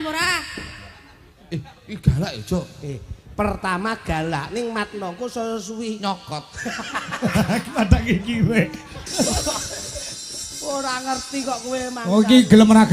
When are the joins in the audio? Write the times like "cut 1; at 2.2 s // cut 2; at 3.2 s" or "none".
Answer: none